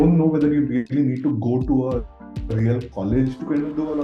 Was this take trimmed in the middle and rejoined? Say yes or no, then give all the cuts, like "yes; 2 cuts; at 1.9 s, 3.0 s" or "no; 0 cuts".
no; 0 cuts